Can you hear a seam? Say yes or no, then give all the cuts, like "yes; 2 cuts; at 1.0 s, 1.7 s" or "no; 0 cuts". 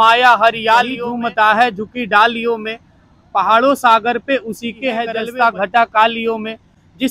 yes; 2 cuts; at 1.0 s, 5.2 s